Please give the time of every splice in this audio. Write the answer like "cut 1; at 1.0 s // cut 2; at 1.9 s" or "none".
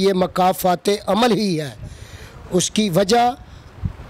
none